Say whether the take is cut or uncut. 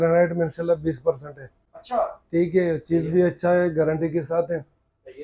uncut